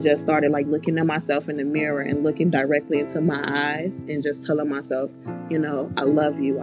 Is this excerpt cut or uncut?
uncut